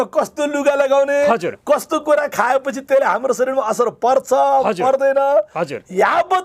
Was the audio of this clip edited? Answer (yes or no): no